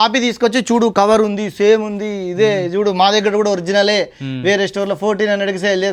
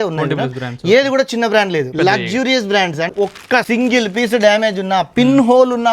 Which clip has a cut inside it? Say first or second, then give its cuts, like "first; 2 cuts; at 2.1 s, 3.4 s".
second; 2 cuts; at 1.9 s, 3.1 s